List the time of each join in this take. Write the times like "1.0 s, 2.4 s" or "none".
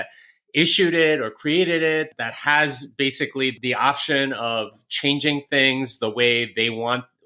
none